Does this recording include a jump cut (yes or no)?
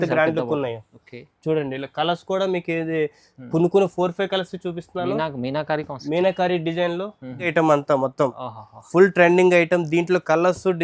yes